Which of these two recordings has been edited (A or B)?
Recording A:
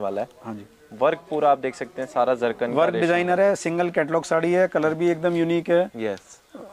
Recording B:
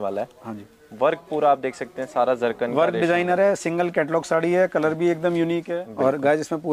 B